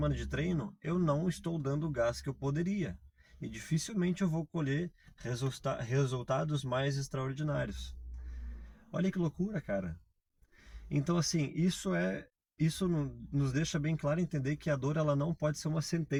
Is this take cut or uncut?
uncut